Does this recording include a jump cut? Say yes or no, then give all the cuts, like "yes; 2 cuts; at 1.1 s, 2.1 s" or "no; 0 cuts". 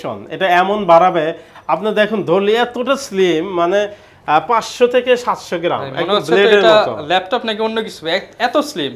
no; 0 cuts